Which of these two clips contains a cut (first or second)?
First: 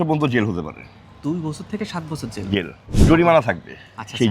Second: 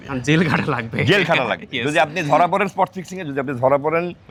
first